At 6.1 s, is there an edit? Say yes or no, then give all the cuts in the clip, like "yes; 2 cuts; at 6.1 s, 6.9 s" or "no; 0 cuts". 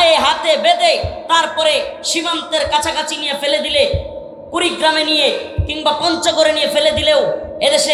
no; 0 cuts